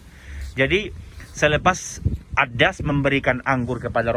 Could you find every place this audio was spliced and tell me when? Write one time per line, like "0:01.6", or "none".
none